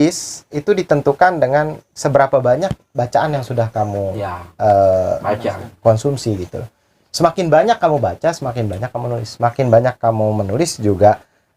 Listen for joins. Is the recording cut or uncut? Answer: uncut